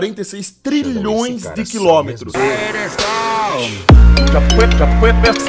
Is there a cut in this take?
yes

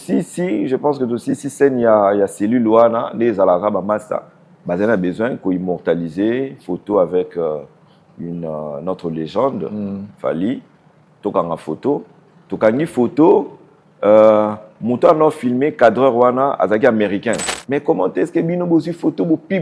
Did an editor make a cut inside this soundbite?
yes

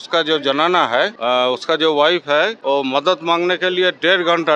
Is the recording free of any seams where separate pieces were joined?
yes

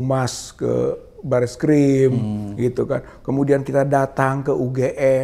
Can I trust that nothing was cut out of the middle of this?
yes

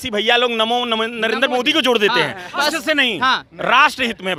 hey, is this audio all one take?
yes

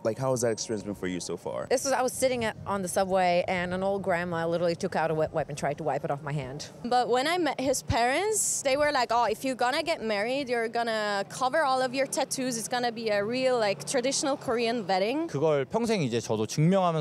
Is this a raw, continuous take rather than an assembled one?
no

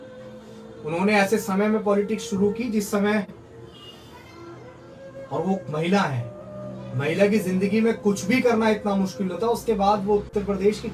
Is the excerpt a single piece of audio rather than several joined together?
no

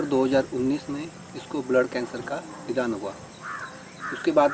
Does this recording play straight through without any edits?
yes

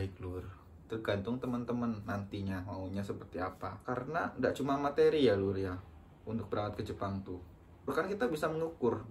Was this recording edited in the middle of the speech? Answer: yes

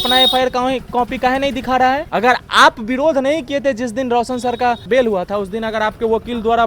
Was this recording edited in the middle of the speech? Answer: yes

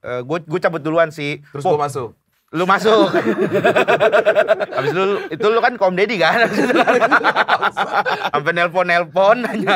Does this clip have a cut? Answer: yes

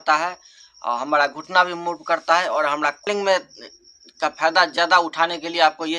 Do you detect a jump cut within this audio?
yes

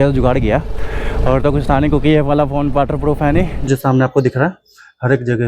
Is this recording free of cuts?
no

